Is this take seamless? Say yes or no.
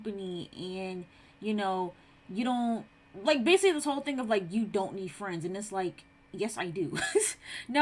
yes